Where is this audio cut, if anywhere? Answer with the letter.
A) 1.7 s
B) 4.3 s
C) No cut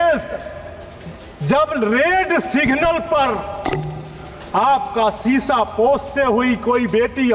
C